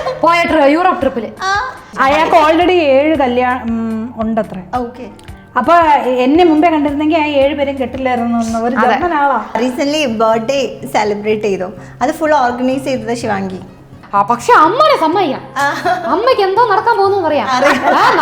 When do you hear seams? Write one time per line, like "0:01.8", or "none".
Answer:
0:01.8
0:09.6
0:13.9